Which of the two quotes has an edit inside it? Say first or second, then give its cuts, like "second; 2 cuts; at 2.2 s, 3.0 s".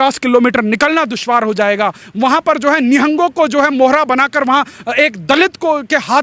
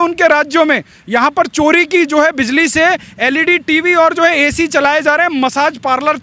first; 1 cut; at 2.0 s